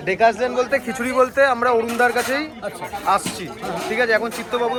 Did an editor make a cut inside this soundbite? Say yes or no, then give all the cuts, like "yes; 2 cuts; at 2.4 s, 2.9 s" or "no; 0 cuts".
no; 0 cuts